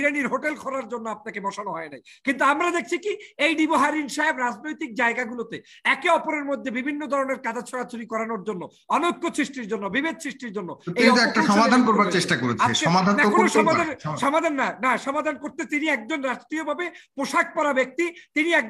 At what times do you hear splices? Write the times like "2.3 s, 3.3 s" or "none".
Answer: none